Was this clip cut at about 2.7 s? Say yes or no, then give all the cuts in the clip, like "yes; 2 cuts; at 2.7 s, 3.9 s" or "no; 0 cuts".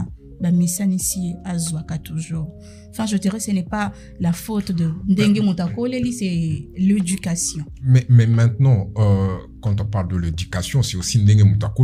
no; 0 cuts